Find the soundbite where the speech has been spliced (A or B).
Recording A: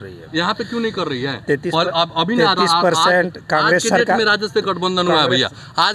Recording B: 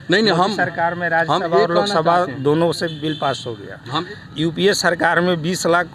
B